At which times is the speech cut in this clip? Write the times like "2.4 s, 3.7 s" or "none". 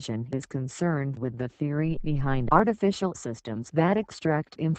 1.3 s